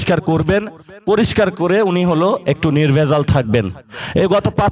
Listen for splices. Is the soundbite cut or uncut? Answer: uncut